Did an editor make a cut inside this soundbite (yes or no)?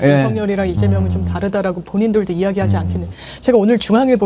no